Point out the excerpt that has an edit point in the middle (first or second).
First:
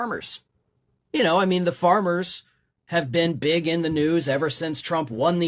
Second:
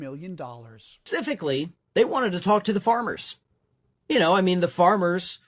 second